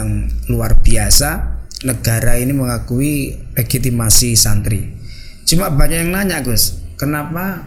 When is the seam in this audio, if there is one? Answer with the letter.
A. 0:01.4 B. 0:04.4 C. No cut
C